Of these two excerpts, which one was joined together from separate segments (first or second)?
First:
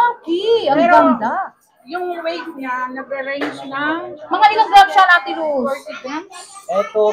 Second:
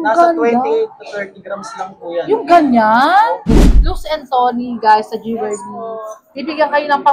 second